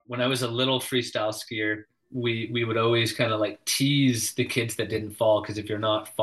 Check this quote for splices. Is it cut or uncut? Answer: cut